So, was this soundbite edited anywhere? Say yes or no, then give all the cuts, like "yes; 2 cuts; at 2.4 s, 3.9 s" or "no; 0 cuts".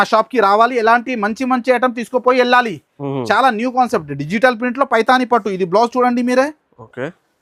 no; 0 cuts